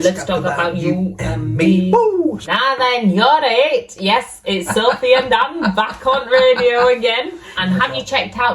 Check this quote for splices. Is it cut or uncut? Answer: cut